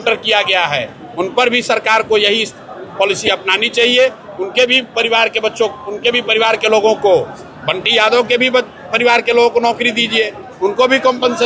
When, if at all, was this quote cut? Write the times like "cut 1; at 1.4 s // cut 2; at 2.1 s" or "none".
none